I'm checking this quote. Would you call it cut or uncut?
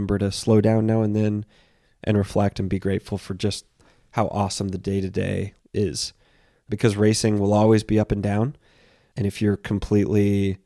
cut